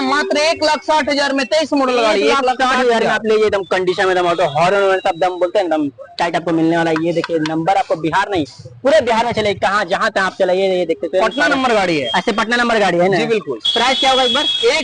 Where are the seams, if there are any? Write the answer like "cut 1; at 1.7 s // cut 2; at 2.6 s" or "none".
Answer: none